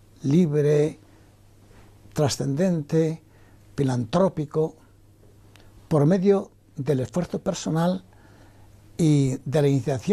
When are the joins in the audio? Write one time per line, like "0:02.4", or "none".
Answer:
none